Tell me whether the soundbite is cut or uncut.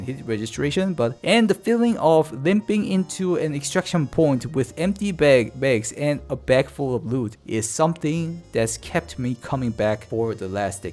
cut